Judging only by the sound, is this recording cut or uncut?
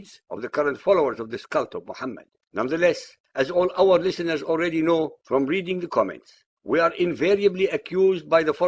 uncut